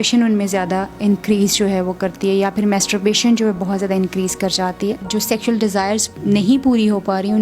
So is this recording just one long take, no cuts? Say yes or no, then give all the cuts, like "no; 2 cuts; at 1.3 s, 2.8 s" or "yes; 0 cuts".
no; 2 cuts; at 5.0 s, 6.1 s